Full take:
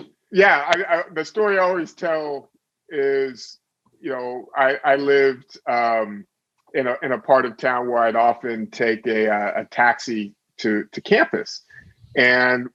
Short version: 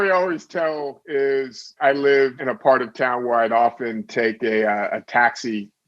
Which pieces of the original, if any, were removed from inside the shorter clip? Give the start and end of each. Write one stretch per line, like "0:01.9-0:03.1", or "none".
0:02.4-0:02.8
0:03.6-0:04.8
0:05.4-0:07.0